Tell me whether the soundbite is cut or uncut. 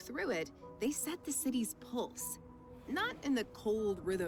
uncut